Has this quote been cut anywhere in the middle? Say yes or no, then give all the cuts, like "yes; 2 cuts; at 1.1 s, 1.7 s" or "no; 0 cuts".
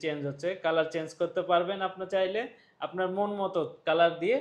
no; 0 cuts